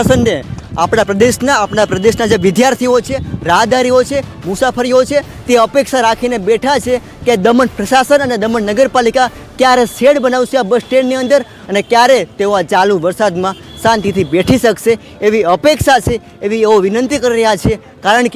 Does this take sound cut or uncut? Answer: uncut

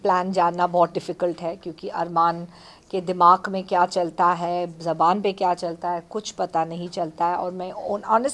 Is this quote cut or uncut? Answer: uncut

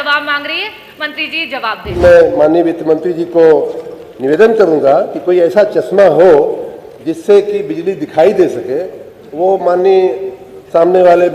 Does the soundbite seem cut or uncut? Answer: cut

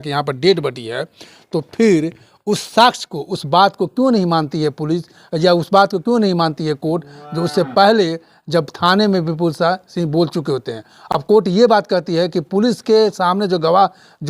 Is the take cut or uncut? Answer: uncut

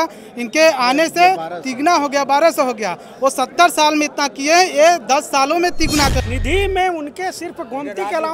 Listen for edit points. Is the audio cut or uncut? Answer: cut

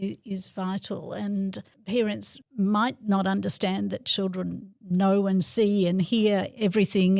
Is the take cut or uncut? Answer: cut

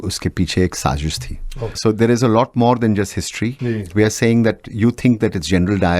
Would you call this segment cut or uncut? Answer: cut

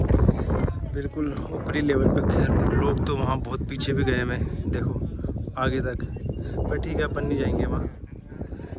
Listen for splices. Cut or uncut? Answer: uncut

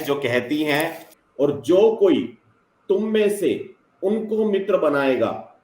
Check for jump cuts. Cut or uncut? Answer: cut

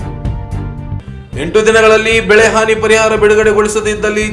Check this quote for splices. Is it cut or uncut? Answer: cut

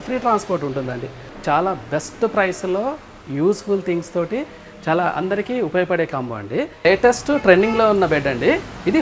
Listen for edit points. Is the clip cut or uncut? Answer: cut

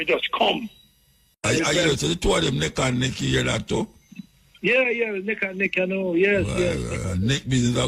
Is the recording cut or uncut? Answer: cut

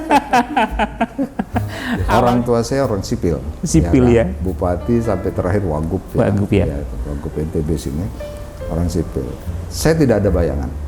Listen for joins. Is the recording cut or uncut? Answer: cut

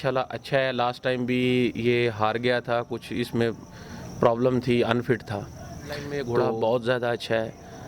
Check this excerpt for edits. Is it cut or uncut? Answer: cut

